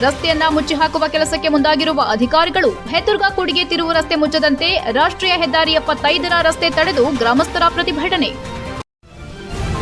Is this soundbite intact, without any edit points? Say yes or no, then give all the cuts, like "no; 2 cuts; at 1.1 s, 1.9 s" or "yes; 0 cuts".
no; 1 cut; at 8.9 s